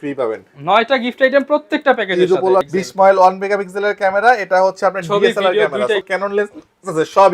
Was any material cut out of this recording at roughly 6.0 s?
yes; 2 cuts; at 2.7 s, 6.0 s

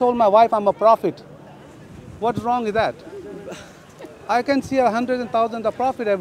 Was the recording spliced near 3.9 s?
no; 0 cuts

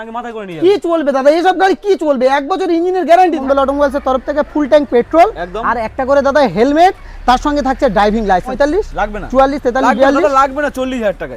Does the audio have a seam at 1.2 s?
no; 2 cuts; at 3.4 s, 8.5 s

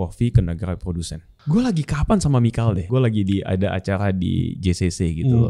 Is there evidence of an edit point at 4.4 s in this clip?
no; 2 cuts; at 1.3 s, 2.8 s

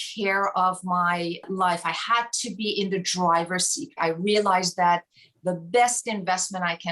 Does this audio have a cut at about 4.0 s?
yes; 2 cuts; at 1.4 s, 4.0 s

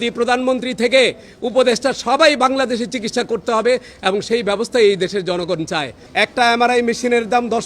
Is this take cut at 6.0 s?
yes; 1 cut; at 6.0 s

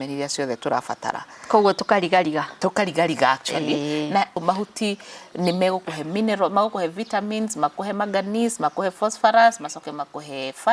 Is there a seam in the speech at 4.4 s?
yes; 1 cut; at 4.4 s

